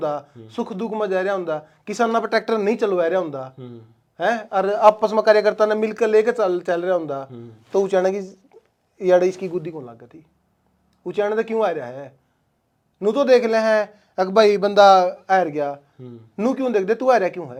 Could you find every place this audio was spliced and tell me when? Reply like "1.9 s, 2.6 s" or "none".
none